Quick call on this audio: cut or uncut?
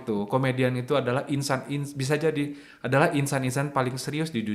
uncut